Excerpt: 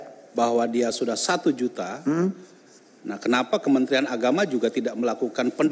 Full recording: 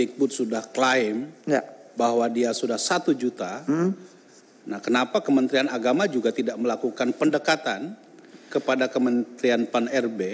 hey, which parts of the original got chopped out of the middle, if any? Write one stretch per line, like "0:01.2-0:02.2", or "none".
none